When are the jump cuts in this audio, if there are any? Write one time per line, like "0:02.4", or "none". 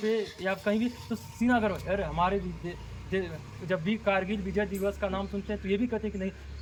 none